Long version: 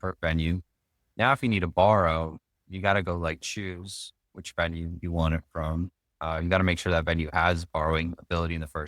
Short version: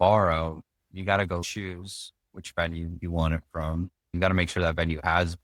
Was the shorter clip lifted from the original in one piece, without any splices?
no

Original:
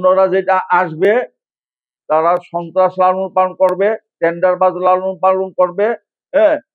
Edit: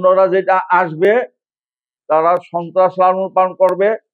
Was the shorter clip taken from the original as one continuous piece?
yes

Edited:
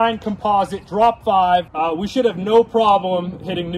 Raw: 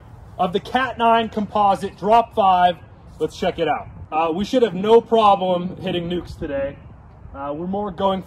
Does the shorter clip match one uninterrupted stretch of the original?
no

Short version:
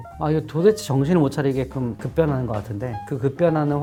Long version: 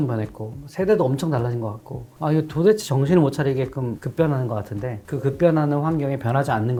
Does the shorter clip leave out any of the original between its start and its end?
no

